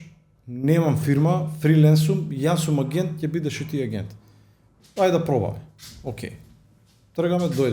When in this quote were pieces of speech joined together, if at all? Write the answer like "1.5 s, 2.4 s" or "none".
none